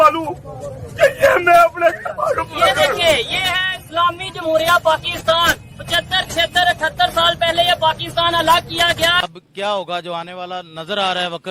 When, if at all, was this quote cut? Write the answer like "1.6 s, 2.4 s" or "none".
9.2 s